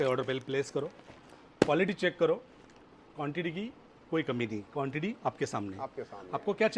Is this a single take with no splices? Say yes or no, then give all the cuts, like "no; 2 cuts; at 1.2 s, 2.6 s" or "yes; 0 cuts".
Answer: yes; 0 cuts